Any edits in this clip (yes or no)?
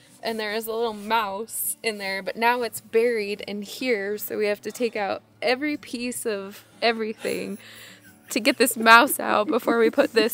no